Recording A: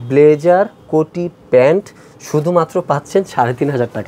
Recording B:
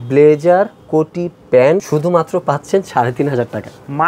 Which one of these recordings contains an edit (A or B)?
B